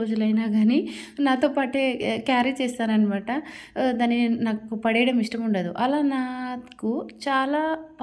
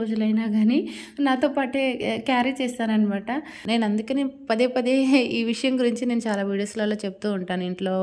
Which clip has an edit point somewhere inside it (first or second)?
second